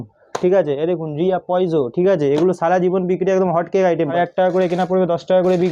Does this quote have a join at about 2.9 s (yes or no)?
no